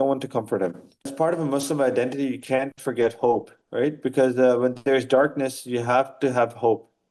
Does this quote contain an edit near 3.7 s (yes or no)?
no